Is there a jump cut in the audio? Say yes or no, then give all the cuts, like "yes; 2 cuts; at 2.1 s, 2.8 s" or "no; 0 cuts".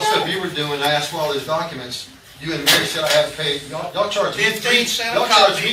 no; 0 cuts